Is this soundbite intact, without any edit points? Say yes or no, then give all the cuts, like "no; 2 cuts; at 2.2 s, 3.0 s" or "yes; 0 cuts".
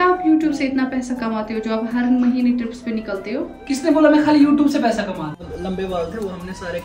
no; 1 cut; at 5.3 s